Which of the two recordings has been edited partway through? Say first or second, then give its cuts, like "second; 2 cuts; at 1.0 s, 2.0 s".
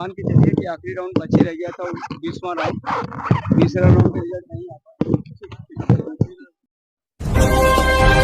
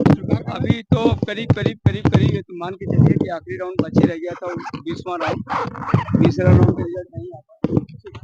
first; 1 cut; at 6.9 s